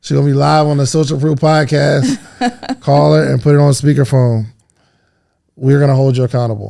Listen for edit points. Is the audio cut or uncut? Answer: uncut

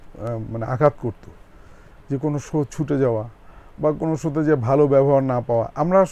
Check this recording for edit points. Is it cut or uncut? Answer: uncut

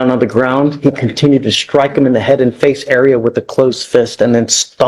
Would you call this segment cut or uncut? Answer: uncut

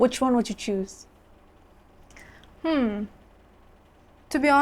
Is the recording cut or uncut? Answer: uncut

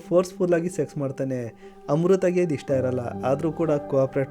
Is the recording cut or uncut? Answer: uncut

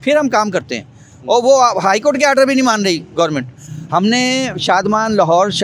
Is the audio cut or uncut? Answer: uncut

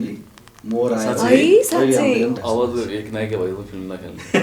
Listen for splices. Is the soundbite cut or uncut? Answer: cut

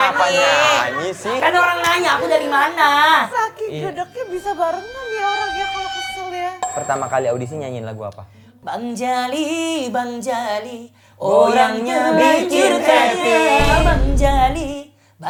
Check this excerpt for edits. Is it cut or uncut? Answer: uncut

